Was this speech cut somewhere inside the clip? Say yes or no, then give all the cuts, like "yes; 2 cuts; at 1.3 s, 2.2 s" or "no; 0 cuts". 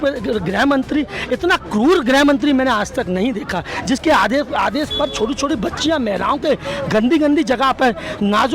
no; 0 cuts